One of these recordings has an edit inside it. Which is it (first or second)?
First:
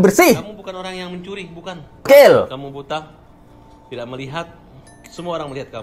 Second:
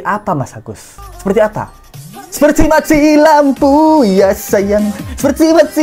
first